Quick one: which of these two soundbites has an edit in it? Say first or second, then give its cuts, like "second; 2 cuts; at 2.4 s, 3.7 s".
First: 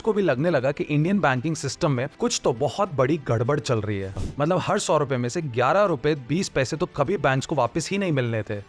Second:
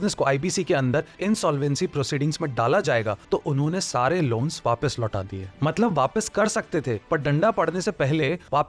first; 1 cut; at 4.2 s